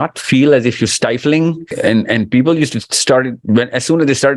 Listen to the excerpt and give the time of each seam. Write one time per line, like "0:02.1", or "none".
0:01.7